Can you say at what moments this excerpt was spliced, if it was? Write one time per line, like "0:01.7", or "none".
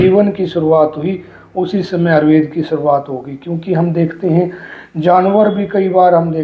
none